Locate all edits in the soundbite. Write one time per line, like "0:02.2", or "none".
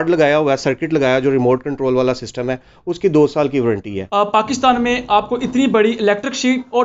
0:03.9